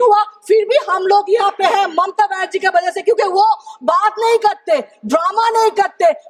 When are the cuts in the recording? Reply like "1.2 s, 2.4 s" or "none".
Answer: none